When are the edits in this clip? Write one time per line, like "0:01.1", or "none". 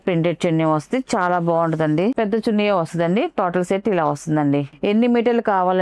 0:02.1
0:04.7